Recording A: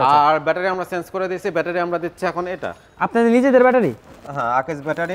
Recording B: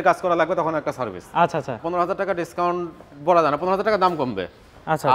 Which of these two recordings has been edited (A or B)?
B